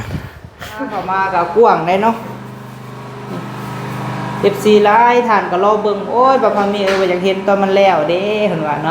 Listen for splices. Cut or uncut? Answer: cut